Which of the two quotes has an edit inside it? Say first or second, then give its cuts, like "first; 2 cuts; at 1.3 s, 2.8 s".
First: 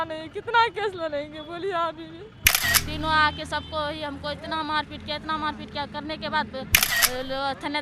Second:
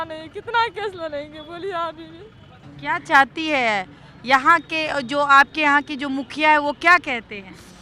first; 2 cuts; at 2.7 s, 6.8 s